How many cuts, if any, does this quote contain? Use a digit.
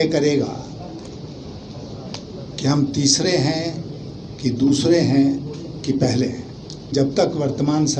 1